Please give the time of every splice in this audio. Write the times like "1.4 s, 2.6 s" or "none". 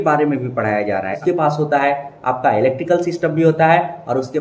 1.1 s